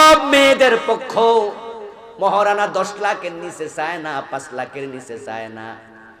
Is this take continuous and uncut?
yes; 0 cuts

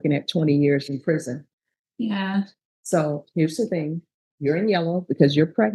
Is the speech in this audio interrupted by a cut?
no; 0 cuts

